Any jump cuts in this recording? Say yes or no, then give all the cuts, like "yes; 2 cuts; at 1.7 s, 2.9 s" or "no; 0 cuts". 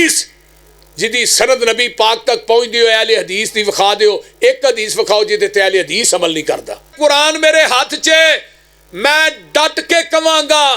yes; 1 cut; at 6.9 s